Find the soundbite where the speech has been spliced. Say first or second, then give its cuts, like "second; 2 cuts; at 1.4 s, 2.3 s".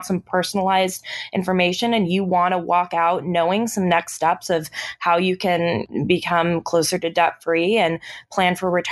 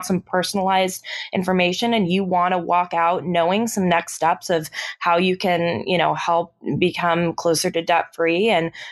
first; 1 cut; at 5.8 s